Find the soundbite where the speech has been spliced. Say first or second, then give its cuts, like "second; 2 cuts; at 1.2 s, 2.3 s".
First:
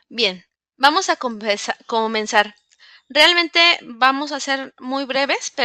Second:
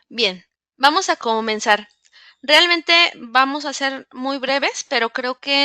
second; 1 cut; at 1.2 s